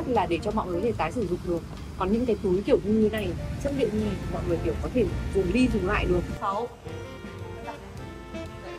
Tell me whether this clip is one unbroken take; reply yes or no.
yes